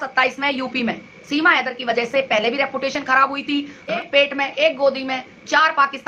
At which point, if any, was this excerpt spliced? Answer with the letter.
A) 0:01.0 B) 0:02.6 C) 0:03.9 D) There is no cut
C